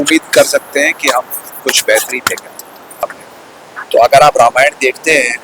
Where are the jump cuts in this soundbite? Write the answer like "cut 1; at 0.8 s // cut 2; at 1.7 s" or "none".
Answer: cut 1; at 3.2 s